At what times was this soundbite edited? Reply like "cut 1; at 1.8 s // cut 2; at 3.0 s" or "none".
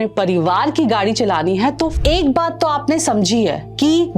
cut 1; at 2.0 s